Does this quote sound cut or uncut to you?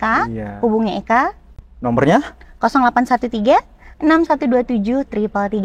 uncut